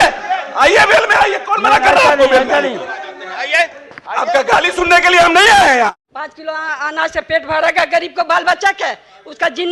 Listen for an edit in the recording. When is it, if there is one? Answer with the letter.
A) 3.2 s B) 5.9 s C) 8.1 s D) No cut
B